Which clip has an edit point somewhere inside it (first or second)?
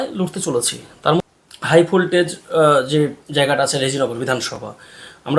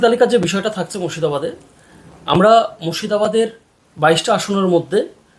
first